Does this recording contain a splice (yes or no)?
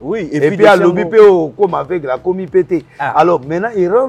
no